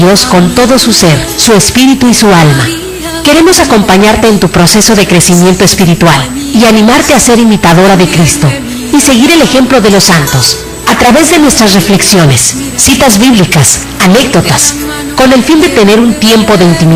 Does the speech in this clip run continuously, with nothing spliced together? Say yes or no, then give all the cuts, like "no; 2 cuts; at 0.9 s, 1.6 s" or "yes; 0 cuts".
yes; 0 cuts